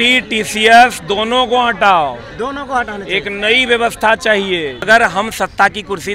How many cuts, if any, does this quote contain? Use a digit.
1